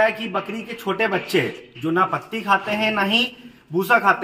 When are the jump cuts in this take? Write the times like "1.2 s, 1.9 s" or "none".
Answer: none